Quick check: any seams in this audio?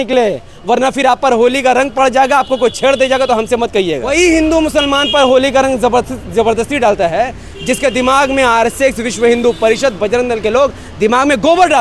yes; 1 cut; at 4.1 s

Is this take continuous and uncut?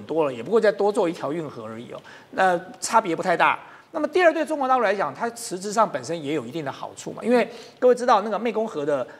yes; 0 cuts

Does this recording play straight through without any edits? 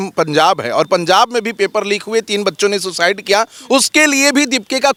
yes; 0 cuts

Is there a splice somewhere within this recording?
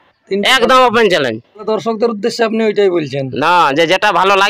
yes; 1 cut; at 1.6 s

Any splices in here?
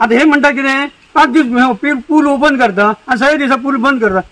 no; 0 cuts

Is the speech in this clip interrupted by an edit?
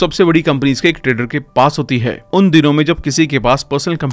no; 0 cuts

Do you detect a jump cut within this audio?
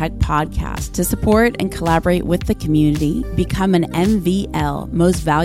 no; 0 cuts

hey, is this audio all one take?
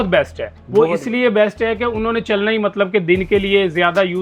yes; 0 cuts

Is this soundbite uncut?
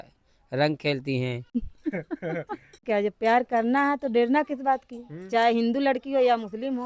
no; 2 cuts; at 1.6 s, 2.8 s

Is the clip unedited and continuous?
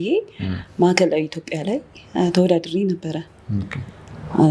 yes; 0 cuts

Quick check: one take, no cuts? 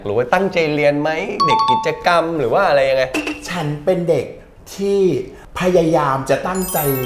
yes; 0 cuts

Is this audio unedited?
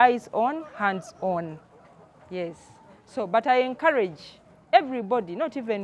yes; 0 cuts

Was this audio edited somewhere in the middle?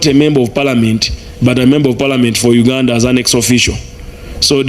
no; 0 cuts

